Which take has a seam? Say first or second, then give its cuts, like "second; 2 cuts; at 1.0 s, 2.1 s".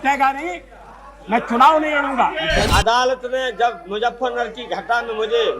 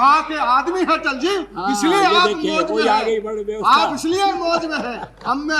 first; 1 cut; at 2.7 s